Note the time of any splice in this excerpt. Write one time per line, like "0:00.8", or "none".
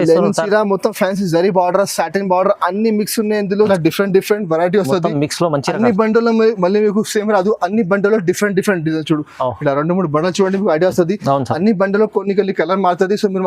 0:03.7